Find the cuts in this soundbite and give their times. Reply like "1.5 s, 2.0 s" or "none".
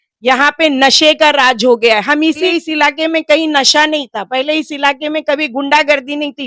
2.5 s